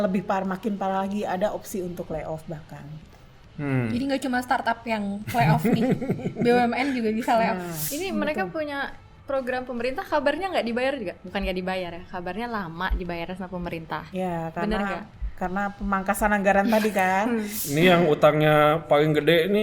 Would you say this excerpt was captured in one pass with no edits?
no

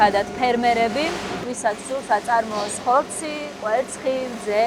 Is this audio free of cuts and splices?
yes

